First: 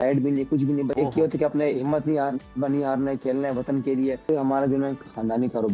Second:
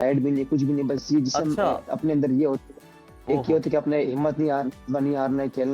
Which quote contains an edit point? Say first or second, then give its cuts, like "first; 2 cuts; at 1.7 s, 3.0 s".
first; 2 cuts; at 0.9 s, 4.2 s